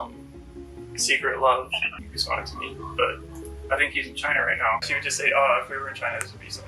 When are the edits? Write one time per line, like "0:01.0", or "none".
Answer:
0:01.9
0:04.9